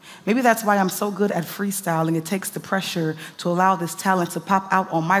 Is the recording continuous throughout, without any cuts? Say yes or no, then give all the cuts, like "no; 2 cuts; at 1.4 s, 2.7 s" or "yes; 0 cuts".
yes; 0 cuts